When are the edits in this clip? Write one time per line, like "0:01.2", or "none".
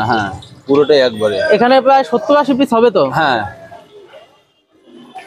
0:03.7